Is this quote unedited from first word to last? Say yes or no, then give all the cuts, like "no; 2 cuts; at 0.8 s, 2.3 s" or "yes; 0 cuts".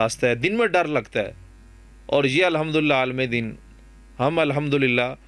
yes; 0 cuts